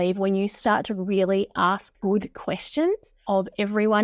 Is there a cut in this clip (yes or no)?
yes